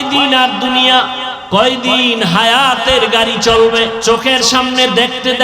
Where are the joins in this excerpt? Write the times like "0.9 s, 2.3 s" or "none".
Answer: 1.3 s, 4.0 s